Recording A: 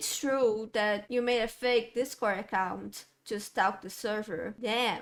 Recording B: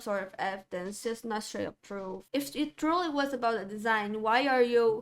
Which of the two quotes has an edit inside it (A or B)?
B